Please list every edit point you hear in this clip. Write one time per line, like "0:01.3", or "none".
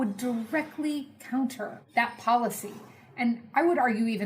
0:01.8